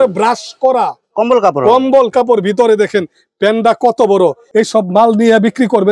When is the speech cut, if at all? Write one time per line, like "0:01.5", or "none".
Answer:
0:04.4